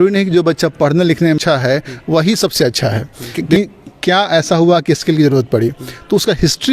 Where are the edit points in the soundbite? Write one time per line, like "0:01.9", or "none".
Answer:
0:01.4
0:03.4